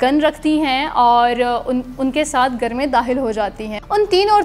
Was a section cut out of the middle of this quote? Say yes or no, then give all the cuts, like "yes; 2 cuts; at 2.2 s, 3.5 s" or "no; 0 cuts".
no; 0 cuts